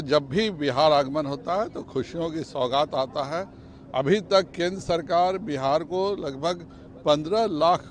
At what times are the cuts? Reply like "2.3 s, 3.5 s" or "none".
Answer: none